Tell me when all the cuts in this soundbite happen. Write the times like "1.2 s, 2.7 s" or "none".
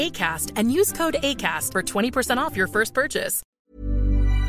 3.4 s